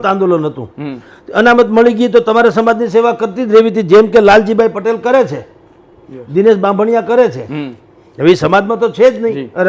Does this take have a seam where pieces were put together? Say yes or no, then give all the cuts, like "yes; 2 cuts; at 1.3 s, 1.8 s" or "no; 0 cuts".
no; 0 cuts